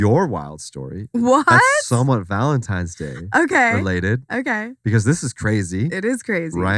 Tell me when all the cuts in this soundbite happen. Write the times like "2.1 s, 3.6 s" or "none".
none